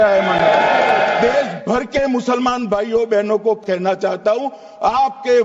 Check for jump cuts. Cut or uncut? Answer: cut